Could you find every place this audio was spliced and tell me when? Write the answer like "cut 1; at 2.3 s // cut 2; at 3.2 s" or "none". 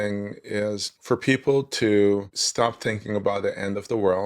cut 1; at 0.9 s // cut 2; at 2.4 s